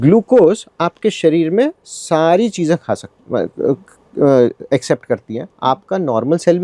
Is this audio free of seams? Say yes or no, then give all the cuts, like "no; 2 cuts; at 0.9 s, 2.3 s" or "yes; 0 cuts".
yes; 0 cuts